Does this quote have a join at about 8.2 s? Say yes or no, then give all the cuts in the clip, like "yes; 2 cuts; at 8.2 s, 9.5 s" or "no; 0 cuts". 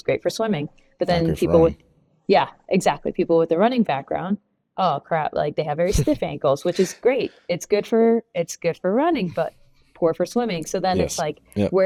no; 0 cuts